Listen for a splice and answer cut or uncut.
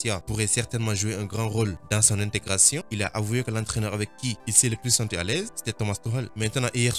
cut